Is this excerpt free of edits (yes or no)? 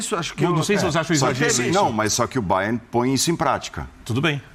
yes